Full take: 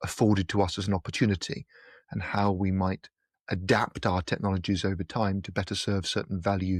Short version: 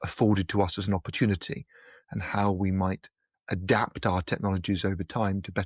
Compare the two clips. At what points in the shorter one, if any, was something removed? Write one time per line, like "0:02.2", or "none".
none